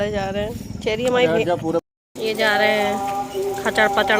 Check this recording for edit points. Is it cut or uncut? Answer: cut